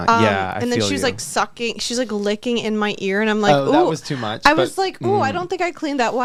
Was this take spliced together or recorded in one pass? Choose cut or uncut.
uncut